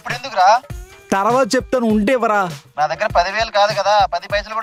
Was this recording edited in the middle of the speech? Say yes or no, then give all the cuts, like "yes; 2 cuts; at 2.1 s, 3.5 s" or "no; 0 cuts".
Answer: no; 0 cuts